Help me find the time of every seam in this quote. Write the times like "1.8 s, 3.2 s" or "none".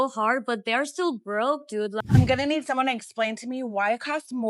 1.9 s